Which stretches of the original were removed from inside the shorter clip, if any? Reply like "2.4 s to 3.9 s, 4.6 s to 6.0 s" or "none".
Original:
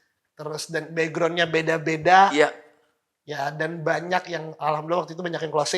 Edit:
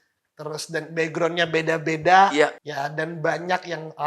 2.6 s to 3.2 s